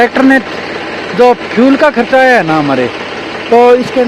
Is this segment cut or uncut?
uncut